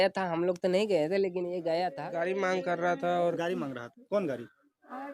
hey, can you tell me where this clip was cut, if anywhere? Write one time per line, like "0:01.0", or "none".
0:02.0